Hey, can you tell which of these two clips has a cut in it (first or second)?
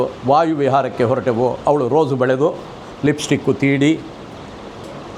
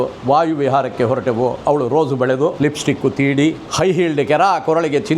second